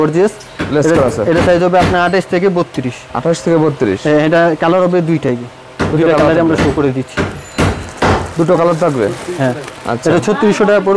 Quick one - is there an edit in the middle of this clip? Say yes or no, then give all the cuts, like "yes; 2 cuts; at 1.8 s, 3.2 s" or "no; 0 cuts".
no; 0 cuts